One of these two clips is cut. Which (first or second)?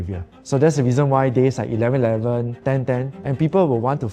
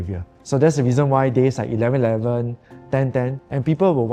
first